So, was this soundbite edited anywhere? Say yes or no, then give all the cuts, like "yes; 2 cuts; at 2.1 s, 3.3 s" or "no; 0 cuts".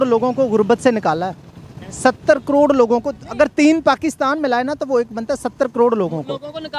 no; 0 cuts